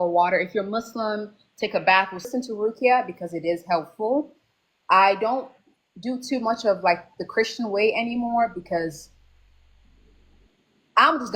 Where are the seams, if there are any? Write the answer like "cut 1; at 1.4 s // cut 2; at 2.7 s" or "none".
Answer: cut 1; at 2.3 s